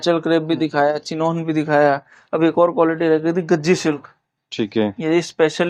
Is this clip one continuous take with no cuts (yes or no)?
yes